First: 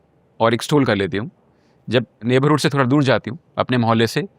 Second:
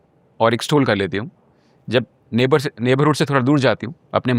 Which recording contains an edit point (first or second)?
first